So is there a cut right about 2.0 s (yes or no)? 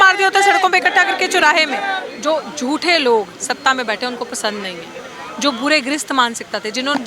yes